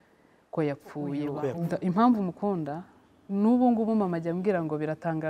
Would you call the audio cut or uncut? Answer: cut